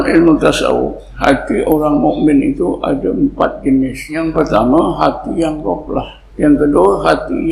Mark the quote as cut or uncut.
cut